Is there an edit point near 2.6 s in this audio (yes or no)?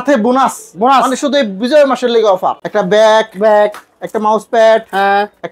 yes